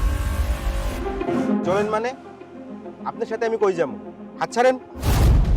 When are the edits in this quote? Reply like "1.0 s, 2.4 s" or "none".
1.1 s